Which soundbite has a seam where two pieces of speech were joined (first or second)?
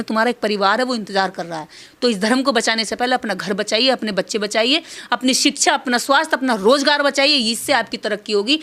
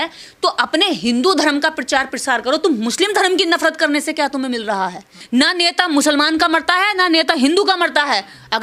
second